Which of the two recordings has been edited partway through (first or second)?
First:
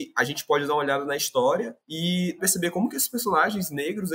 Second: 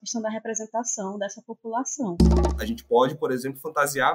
second